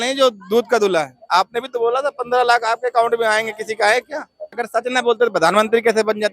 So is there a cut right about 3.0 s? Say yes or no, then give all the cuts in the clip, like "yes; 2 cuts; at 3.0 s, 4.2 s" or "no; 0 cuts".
no; 2 cuts; at 1.2 s, 4.5 s